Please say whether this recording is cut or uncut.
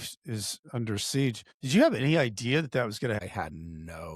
cut